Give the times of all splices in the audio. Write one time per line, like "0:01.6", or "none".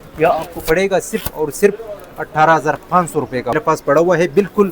0:03.6